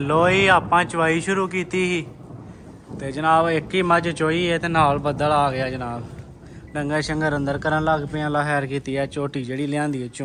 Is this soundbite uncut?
yes; 0 cuts

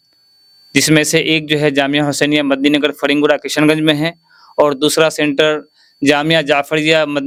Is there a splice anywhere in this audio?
no; 0 cuts

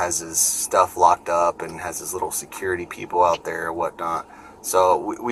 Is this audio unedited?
yes; 0 cuts

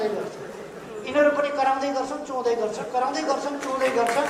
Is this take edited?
no; 0 cuts

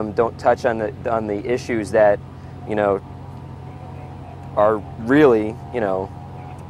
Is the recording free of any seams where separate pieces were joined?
yes; 0 cuts

